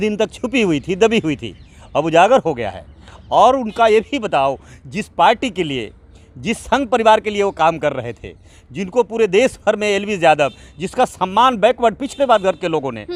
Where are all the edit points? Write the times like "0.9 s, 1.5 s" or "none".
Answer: none